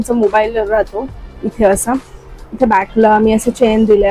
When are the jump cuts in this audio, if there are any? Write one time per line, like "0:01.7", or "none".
none